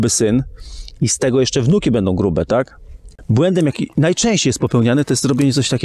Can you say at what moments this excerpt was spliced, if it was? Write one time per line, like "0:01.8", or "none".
0:03.1